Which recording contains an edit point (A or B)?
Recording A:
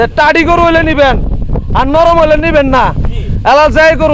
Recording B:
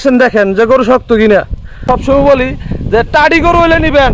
B